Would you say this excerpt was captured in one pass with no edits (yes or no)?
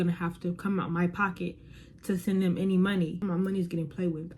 no